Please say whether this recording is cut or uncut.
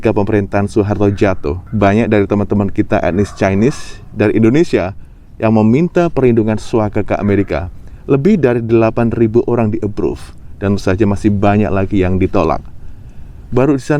cut